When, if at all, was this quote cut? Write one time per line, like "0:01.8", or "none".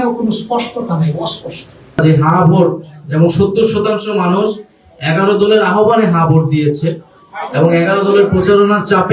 0:02.0